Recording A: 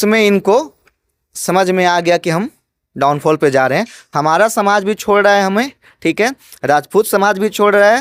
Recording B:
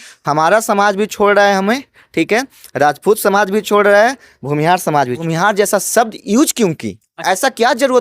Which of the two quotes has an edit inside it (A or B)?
B